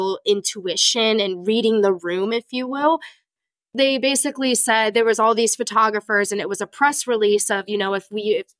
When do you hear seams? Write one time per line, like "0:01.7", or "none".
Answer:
0:03.5